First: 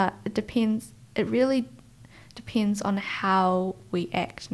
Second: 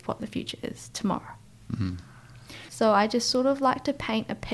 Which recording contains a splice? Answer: second; 1 cut; at 2.6 s

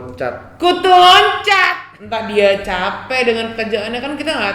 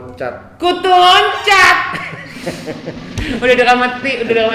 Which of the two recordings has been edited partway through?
first; 1 cut; at 1.7 s

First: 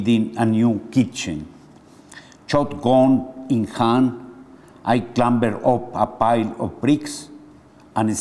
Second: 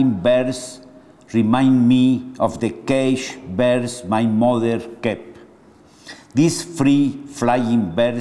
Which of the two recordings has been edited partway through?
second; 1 cut; at 7.0 s

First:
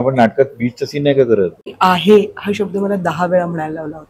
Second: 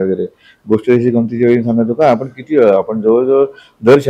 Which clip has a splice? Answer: first; 1 cut; at 1.7 s

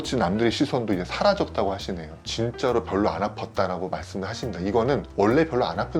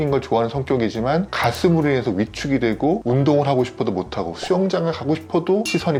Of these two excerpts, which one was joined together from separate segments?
first; 1 cut; at 2.2 s

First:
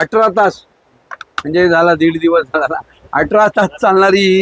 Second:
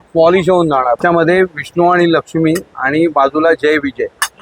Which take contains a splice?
second; 1 cut; at 1.0 s

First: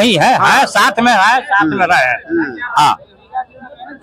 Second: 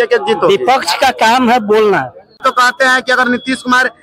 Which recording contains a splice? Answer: second; 1 cut; at 2.4 s

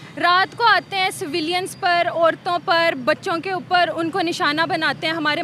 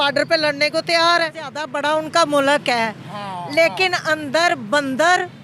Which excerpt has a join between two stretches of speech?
second; 1 cut; at 1.7 s

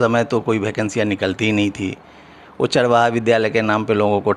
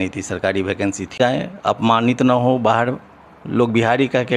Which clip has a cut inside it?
second; 1 cut; at 1.2 s

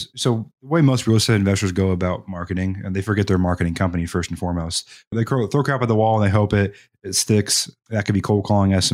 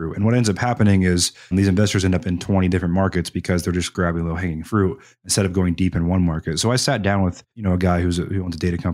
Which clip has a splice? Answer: second; 2 cuts; at 1.5 s, 7.5 s

